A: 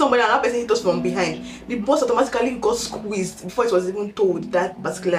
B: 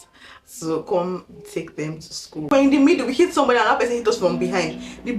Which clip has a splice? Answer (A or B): B